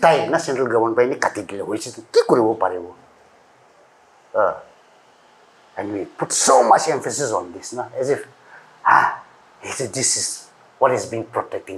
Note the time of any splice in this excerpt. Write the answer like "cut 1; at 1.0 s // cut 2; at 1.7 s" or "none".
none